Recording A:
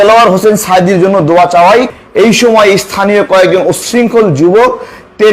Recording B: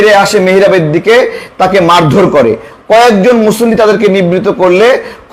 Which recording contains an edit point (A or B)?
A